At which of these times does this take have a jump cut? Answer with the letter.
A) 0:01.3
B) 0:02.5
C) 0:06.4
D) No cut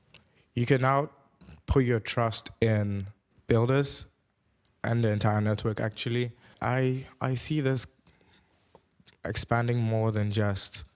C